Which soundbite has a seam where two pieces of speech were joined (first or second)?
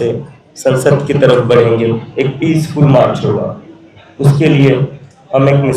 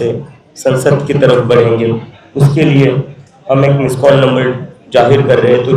second